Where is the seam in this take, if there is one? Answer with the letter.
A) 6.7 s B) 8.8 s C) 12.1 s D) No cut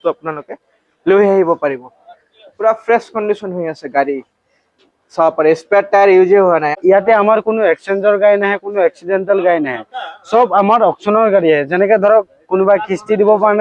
A